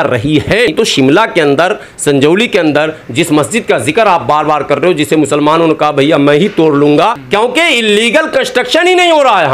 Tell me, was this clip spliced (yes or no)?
yes